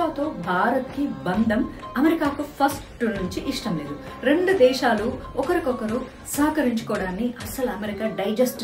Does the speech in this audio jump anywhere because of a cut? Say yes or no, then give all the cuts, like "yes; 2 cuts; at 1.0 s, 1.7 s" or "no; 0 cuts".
yes; 1 cut; at 4.1 s